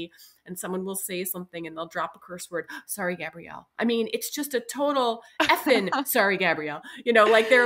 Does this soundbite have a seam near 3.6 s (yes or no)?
no